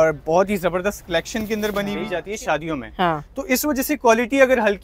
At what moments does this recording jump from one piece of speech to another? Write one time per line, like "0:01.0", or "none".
0:02.0